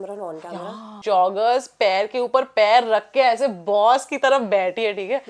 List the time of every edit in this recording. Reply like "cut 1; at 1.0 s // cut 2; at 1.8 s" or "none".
cut 1; at 0.9 s